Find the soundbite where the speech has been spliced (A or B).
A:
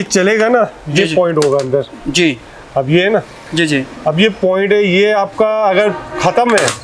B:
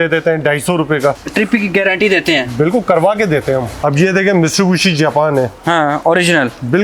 B